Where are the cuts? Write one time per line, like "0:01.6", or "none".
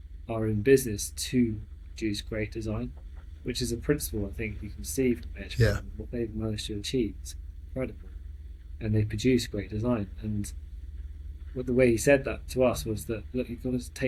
none